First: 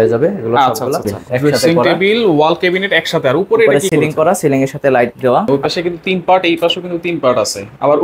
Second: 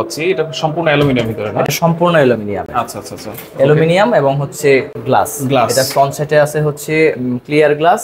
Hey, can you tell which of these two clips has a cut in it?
first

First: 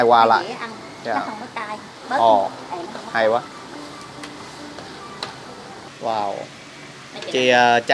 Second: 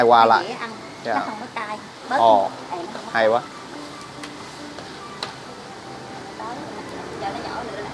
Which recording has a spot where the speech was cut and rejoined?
first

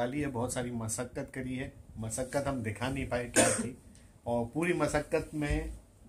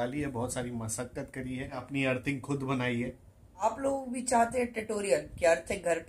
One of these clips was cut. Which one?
second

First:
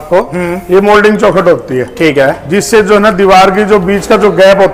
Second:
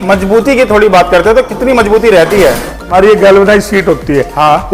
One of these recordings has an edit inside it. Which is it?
second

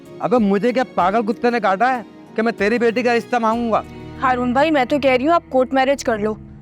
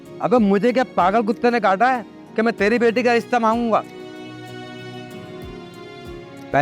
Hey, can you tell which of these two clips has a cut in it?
first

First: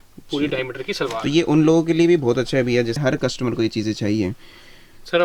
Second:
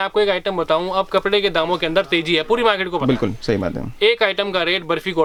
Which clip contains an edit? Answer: first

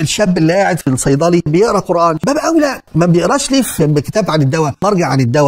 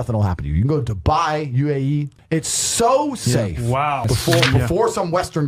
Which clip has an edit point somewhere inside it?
second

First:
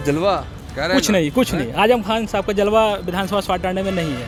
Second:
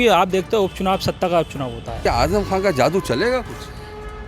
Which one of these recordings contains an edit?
second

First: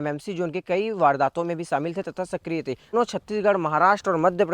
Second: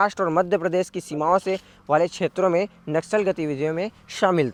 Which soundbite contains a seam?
first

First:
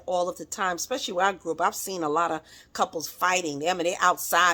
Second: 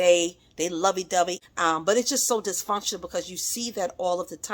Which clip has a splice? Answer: second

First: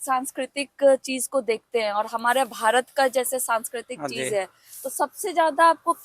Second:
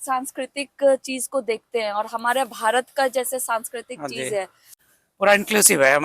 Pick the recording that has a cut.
second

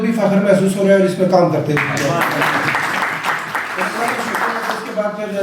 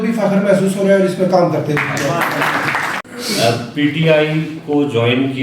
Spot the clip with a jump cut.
second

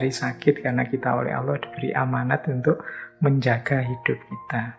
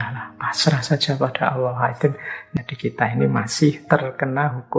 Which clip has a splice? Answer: second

